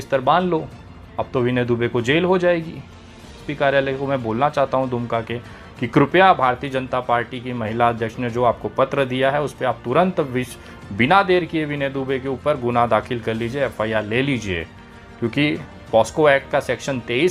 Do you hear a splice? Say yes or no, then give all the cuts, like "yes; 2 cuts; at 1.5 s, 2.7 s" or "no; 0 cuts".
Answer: no; 0 cuts